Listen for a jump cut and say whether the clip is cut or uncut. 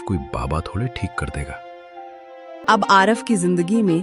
cut